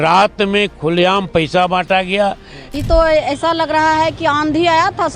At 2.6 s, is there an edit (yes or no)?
yes